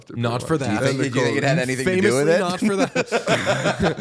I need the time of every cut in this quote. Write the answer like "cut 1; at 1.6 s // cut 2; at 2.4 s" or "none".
none